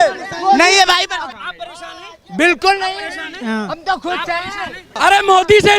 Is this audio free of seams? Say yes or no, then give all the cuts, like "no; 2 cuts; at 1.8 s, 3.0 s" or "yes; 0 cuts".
no; 2 cuts; at 1.3 s, 4.9 s